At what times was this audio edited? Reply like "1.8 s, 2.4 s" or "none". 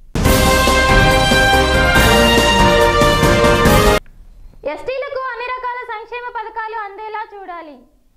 4.0 s